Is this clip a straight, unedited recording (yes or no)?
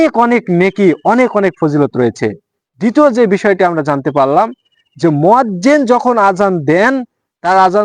yes